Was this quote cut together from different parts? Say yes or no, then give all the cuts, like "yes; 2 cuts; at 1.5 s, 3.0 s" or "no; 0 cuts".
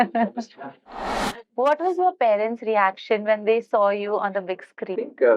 yes; 1 cut; at 1.2 s